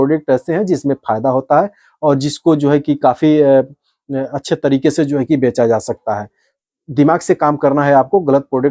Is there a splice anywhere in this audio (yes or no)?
yes